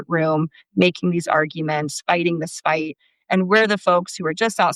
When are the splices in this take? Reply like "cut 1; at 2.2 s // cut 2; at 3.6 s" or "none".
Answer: none